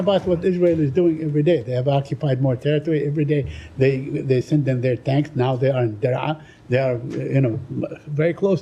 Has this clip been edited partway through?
no; 0 cuts

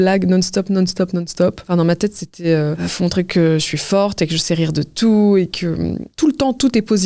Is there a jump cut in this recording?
yes; 3 cuts; at 1.6 s, 2.8 s, 6.1 s

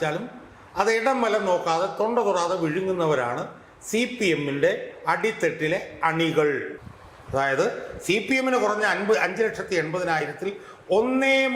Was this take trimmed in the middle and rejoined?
yes; 1 cut; at 6.7 s

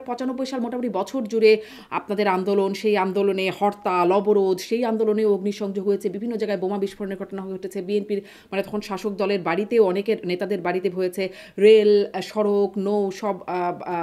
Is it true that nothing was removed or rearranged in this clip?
yes; 0 cuts

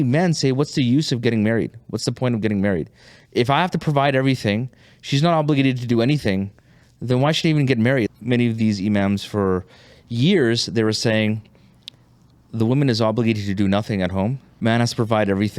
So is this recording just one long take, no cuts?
no; 2 cuts; at 8.1 s, 14.5 s

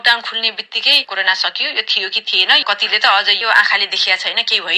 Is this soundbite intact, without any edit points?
no; 1 cut; at 1.1 s

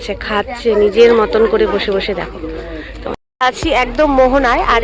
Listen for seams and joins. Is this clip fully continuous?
no; 1 cut; at 3.1 s

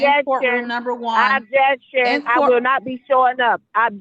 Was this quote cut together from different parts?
no; 0 cuts

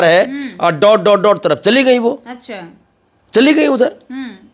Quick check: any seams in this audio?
no; 0 cuts

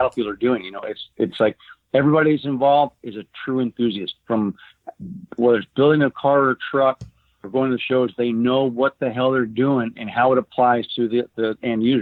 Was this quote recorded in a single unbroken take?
yes; 0 cuts

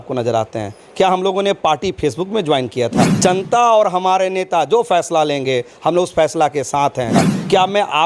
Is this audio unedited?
no; 2 cuts; at 3.1 s, 7.2 s

